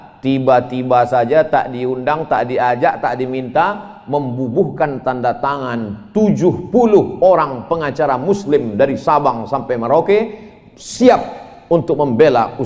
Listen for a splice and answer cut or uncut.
uncut